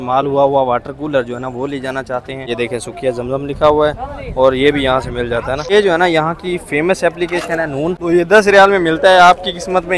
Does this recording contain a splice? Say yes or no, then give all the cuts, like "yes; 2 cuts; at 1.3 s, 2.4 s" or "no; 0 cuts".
yes; 3 cuts; at 2.5 s, 5.6 s, 8.0 s